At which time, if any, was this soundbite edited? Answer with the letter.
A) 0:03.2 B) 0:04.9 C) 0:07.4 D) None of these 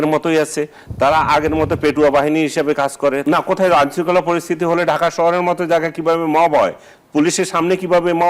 A